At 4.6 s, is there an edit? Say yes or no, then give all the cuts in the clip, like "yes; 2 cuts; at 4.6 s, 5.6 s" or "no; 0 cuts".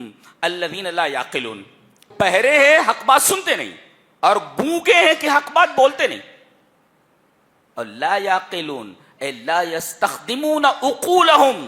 no; 1 cut; at 2.1 s